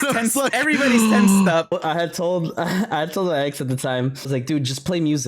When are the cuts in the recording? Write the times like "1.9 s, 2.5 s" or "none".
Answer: 1.6 s, 4.3 s